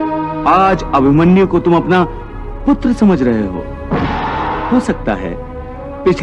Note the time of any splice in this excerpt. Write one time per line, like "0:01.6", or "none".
0:04.6